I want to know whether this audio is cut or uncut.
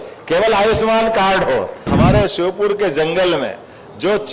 cut